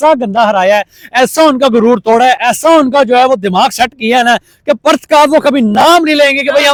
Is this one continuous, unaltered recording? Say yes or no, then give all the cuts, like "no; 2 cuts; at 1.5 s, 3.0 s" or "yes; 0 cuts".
yes; 0 cuts